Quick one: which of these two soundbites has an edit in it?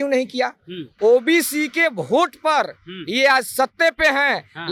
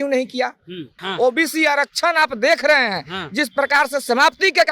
second; 1 cut; at 0.9 s

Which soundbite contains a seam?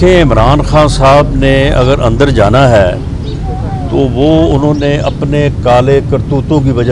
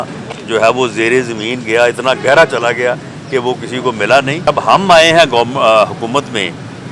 second; 1 cut; at 4.5 s

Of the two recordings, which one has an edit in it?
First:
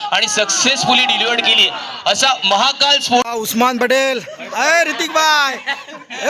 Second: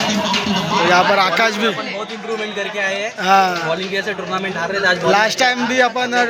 first; 1 cut; at 3.3 s

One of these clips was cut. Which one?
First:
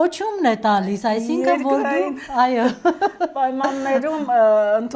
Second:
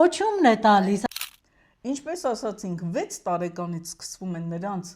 second; 1 cut; at 1.0 s

